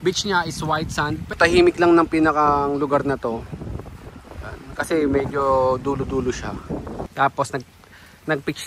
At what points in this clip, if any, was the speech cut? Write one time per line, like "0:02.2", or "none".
0:01.3
0:07.0